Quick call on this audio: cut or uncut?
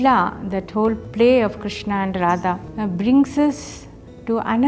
cut